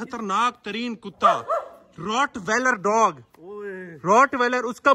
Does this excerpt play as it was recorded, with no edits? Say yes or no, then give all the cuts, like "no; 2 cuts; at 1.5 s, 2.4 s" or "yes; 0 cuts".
yes; 0 cuts